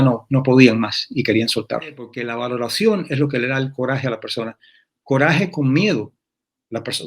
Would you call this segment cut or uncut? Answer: cut